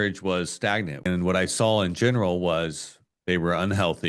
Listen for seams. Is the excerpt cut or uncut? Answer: cut